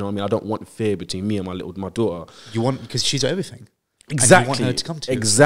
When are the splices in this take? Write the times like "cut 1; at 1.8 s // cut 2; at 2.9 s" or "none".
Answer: none